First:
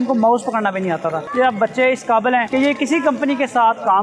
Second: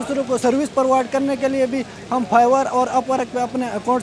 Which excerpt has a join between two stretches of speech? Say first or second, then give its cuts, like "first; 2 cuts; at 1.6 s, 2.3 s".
first; 2 cuts; at 1.2 s, 2.5 s